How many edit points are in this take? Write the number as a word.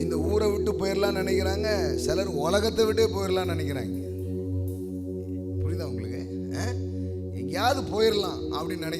zero